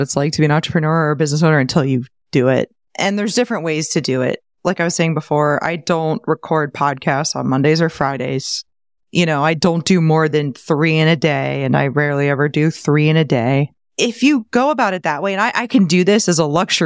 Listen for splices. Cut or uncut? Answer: cut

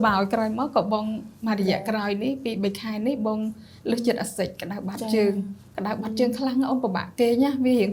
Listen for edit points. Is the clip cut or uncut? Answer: uncut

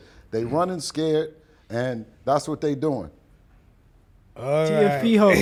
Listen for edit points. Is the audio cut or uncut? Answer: uncut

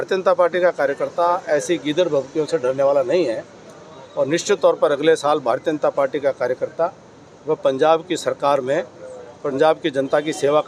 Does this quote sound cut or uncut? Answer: uncut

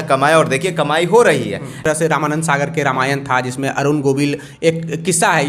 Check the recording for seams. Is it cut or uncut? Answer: cut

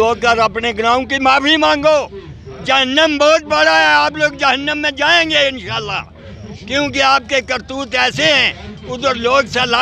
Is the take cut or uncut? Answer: uncut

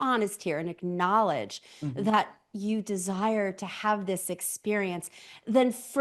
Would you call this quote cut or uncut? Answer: uncut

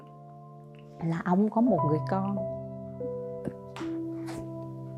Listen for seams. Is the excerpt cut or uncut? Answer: uncut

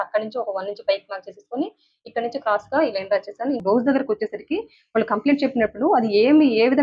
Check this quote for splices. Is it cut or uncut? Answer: cut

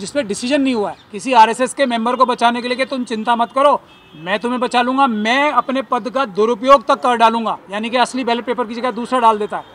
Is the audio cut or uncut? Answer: cut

